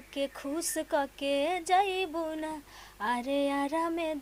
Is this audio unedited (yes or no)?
yes